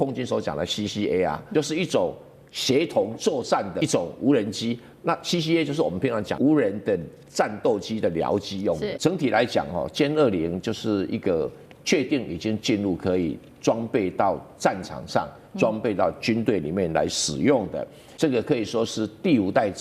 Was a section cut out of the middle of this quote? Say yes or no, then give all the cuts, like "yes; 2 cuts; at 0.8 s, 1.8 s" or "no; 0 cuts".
yes; 5 cuts; at 1.4 s, 3.8 s, 6.3 s, 8.9 s, 18.0 s